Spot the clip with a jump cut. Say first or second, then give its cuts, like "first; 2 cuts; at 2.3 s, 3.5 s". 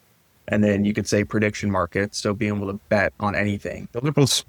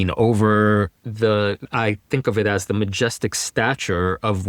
second; 1 cut; at 1.7 s